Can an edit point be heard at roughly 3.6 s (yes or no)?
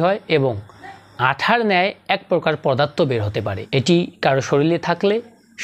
yes